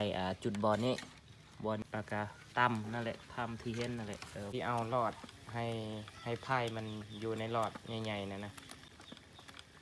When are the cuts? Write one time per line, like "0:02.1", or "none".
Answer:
0:01.8
0:04.5
0:08.9